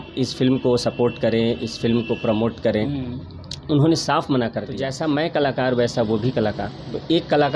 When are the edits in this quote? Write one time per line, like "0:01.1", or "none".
0:04.8